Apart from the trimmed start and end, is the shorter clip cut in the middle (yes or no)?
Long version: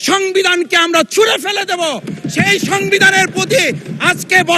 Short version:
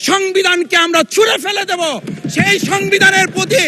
no